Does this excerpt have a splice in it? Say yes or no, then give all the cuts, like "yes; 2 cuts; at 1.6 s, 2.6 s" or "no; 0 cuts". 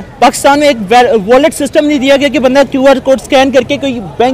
no; 0 cuts